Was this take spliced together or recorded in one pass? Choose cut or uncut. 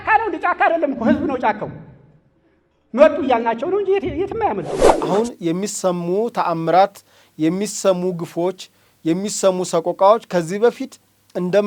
cut